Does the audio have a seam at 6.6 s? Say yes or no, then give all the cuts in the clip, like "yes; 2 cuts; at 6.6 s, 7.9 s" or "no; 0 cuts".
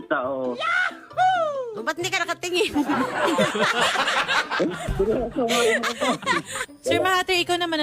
yes; 1 cut; at 6.6 s